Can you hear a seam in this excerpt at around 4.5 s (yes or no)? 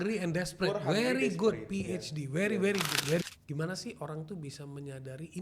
no